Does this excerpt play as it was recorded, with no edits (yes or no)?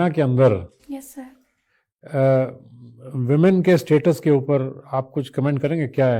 yes